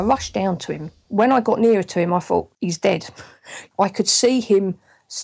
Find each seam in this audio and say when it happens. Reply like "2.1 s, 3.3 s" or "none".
0.9 s, 3.1 s